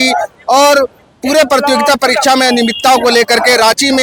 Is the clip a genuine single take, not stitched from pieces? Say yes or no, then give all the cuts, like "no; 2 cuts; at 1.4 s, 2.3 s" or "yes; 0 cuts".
yes; 0 cuts